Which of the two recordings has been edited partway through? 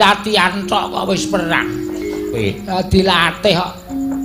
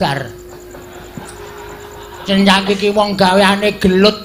first; 1 cut; at 2.4 s

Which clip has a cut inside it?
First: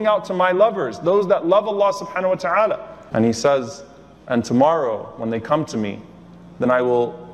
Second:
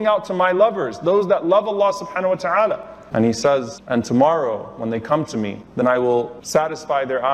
second; 3 cuts; at 3.8 s, 5.6 s, 6.4 s

